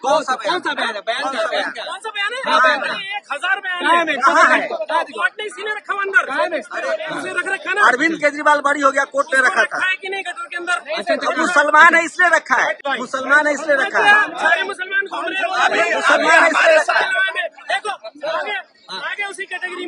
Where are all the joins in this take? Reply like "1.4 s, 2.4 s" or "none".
7.1 s, 12.8 s